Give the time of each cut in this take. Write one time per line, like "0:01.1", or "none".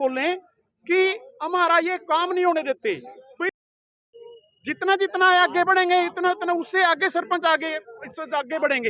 0:03.7